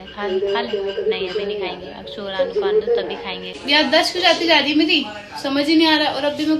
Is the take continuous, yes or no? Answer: no